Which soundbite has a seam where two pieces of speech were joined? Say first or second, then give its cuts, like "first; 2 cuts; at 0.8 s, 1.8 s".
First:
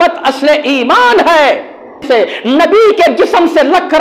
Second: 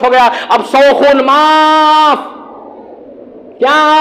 first; 1 cut; at 2.0 s